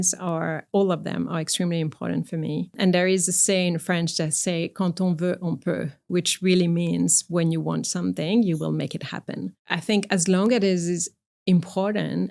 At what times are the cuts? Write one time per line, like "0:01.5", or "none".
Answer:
0:09.7